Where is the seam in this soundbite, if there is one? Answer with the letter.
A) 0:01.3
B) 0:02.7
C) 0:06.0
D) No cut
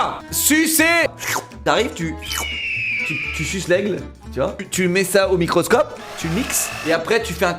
C